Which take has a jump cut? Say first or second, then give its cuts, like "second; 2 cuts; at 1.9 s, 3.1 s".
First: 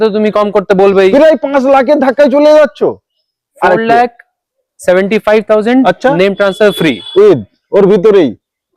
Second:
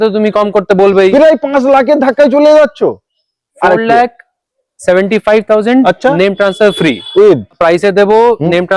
second; 1 cut; at 7.6 s